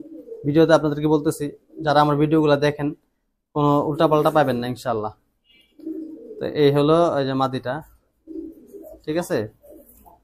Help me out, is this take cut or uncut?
uncut